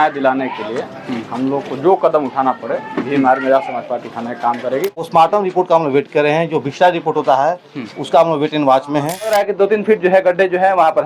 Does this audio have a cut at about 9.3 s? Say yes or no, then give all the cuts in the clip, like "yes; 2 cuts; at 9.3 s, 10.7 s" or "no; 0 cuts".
yes; 2 cuts; at 5.1 s, 9.3 s